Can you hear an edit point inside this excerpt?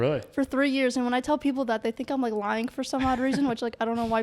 no; 0 cuts

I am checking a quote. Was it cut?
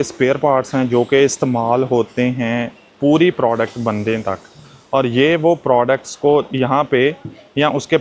no; 0 cuts

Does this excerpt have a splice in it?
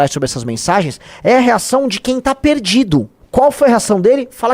yes; 1 cut; at 3.2 s

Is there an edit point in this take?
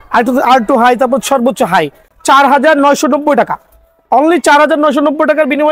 yes; 1 cut; at 2.1 s

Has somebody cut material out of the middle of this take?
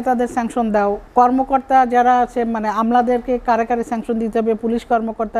yes; 1 cut; at 1.0 s

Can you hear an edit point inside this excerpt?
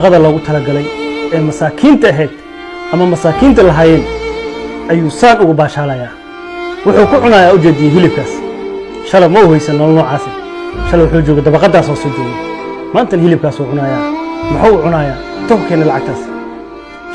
no; 0 cuts

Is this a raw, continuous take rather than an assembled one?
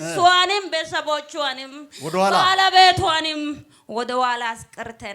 yes; 0 cuts

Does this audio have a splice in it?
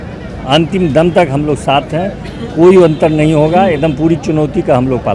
no; 0 cuts

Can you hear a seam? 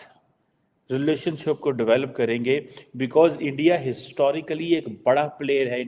no; 0 cuts

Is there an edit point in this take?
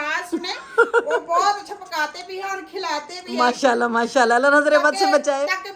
no; 0 cuts

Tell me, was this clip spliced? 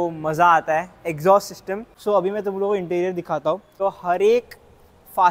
yes; 2 cuts; at 1.9 s, 3.7 s

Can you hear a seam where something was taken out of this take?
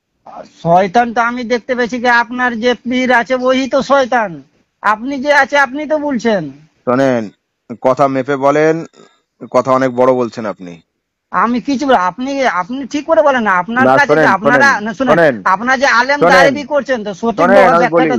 no; 0 cuts

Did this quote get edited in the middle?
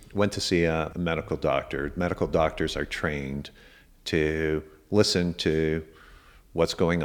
yes; 1 cut; at 0.9 s

